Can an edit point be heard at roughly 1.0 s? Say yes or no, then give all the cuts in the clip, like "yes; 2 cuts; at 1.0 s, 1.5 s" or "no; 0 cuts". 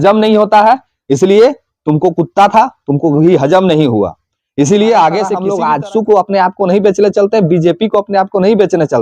no; 1 cut; at 5.4 s